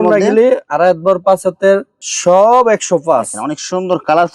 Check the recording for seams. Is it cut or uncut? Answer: cut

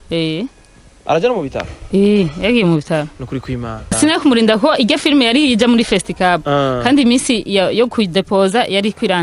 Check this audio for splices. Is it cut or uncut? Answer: cut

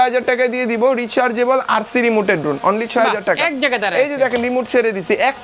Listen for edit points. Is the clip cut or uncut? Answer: uncut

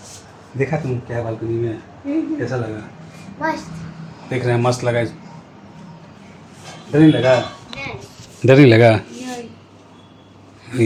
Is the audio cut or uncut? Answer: uncut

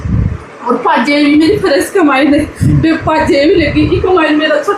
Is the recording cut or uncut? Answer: uncut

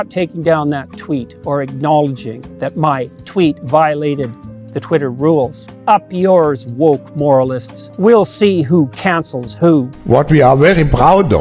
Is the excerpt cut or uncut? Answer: cut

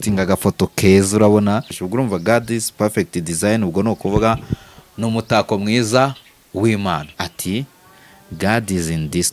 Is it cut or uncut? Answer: cut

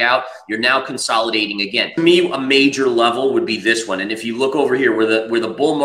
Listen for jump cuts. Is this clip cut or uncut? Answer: cut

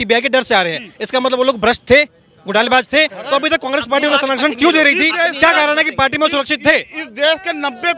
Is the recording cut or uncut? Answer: uncut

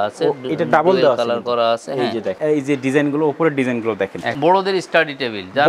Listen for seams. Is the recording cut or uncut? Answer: cut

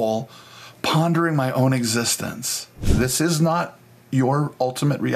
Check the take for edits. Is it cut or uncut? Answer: cut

